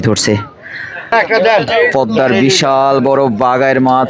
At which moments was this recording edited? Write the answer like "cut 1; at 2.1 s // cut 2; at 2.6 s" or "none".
cut 1; at 1.1 s